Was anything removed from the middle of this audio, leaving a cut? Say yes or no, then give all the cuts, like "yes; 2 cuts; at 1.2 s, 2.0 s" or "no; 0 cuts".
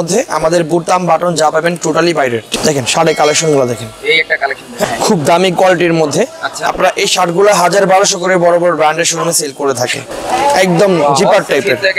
yes; 3 cuts; at 2.5 s, 4.8 s, 10.0 s